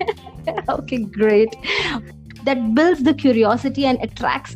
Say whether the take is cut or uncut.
cut